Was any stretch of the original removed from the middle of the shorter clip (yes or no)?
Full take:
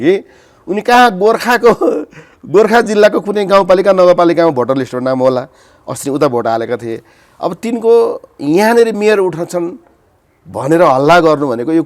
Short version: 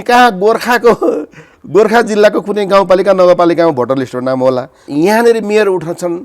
yes